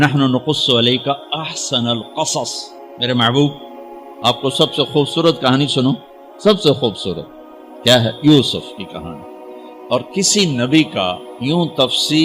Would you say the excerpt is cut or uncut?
uncut